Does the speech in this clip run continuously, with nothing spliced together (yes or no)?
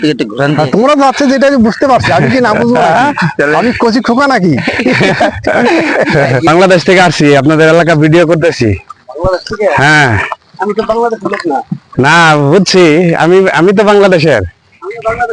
no